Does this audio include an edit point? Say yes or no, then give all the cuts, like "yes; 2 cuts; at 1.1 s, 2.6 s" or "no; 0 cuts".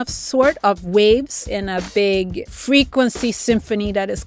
yes; 2 cuts; at 1.5 s, 2.5 s